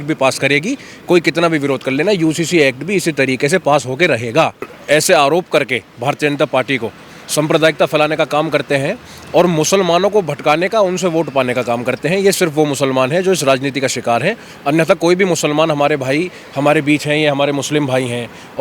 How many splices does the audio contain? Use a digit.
1